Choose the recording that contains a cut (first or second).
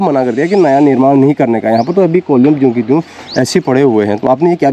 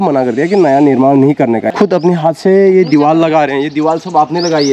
second